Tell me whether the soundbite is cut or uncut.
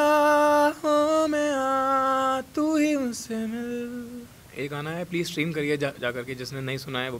uncut